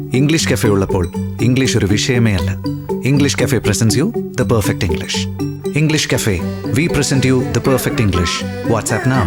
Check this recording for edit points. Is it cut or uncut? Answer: uncut